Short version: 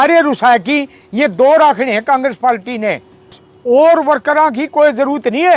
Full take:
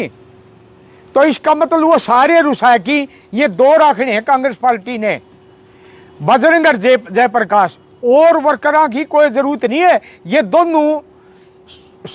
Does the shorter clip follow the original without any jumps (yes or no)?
no